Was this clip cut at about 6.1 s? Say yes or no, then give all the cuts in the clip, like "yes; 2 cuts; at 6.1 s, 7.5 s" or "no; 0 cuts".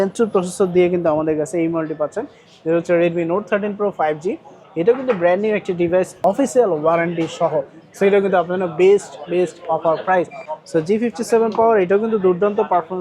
yes; 2 cuts; at 6.1 s, 10.5 s